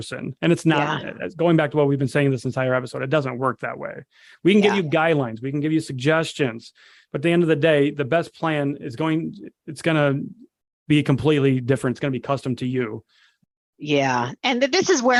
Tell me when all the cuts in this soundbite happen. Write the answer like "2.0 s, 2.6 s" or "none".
none